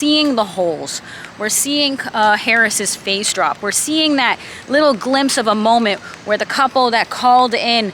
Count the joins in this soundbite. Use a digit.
0